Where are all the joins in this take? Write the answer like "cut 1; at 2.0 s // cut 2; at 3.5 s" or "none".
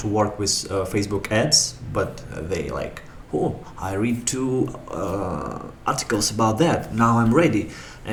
none